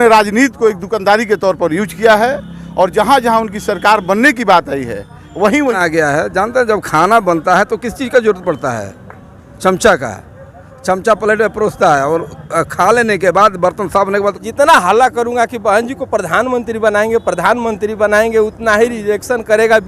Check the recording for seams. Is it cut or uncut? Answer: cut